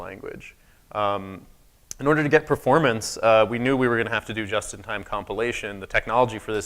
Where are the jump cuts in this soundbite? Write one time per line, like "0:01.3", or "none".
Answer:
0:03.1